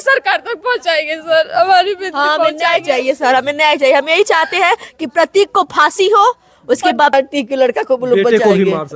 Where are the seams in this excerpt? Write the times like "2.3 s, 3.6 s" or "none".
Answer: 7.1 s